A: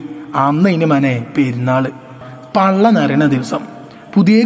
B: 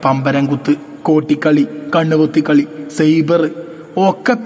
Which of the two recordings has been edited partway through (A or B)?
A